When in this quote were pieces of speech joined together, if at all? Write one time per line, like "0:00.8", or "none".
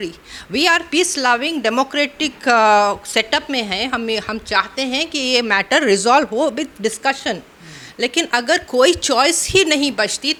none